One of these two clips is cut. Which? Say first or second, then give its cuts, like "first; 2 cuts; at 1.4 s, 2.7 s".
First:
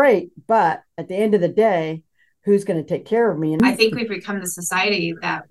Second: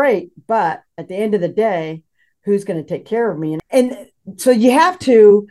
first; 1 cut; at 3.6 s